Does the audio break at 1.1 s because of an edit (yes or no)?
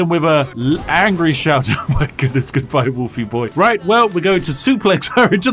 no